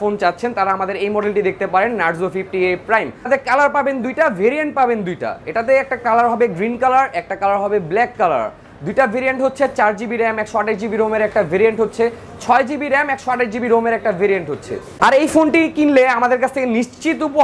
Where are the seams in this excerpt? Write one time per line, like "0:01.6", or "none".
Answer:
0:03.3
0:14.9